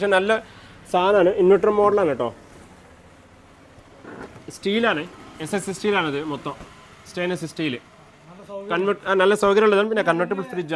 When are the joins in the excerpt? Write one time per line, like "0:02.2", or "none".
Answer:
none